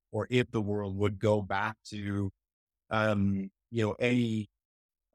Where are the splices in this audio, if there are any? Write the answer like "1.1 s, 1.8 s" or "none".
none